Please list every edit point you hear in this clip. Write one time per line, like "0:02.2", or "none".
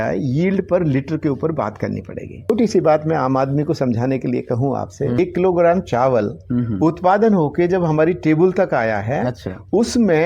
0:02.5
0:05.2